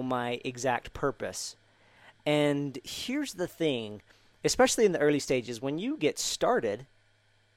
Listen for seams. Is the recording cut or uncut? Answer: uncut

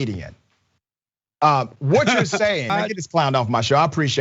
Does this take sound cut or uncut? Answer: cut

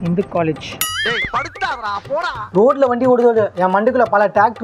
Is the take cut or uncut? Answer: cut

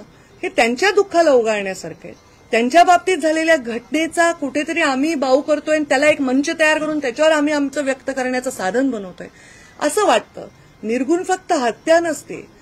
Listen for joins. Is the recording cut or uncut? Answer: uncut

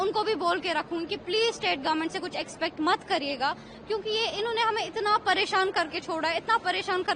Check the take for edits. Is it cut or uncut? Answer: uncut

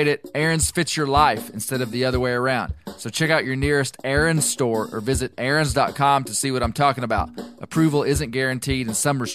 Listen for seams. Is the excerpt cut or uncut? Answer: uncut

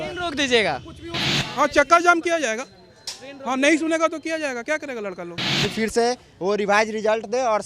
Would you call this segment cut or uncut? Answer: cut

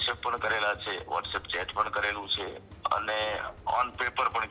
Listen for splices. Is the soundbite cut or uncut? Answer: uncut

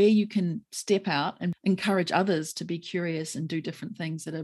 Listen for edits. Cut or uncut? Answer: cut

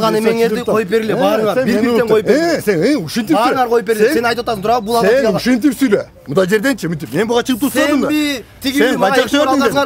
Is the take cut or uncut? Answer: uncut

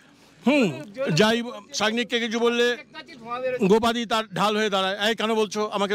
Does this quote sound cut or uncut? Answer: uncut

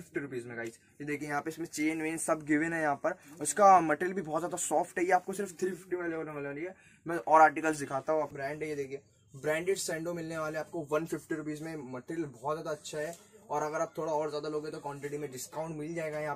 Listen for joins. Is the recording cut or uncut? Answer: cut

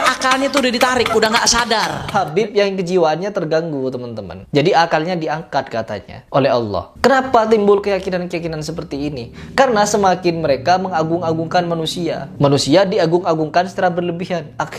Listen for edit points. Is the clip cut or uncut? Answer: cut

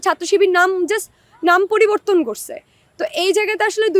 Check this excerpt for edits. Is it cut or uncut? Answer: uncut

